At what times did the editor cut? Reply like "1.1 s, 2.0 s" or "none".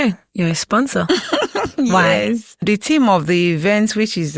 2.6 s